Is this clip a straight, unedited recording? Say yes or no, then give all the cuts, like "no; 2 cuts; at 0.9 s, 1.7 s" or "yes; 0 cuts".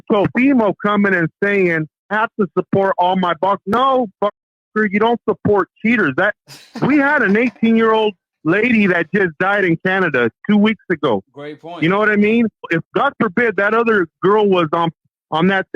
no; 2 cuts; at 2.1 s, 12.7 s